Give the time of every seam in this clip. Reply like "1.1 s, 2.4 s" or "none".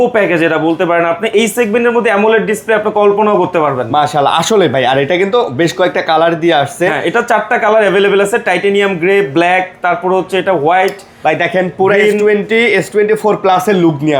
none